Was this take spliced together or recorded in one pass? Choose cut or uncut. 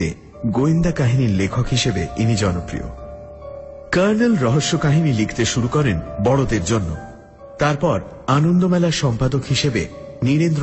cut